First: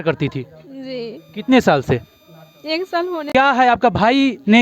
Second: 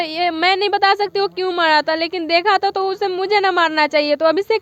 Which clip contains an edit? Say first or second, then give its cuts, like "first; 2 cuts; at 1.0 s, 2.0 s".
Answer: first; 1 cut; at 3.3 s